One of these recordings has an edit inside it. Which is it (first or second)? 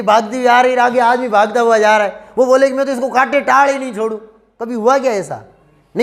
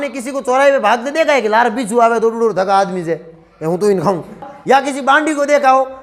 second